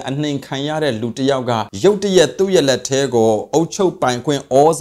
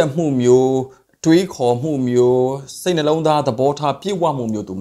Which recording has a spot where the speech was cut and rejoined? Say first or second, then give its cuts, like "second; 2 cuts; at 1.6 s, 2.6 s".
first; 1 cut; at 1.7 s